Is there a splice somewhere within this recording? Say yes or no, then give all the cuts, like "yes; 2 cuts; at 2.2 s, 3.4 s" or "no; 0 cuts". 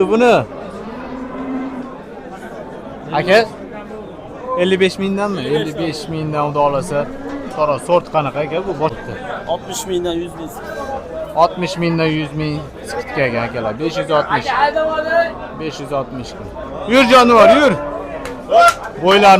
yes; 1 cut; at 8.9 s